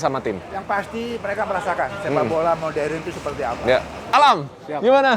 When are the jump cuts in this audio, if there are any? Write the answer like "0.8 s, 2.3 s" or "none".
4.0 s